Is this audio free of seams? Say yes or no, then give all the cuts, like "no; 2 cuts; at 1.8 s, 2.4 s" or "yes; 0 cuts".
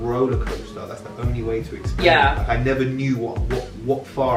yes; 0 cuts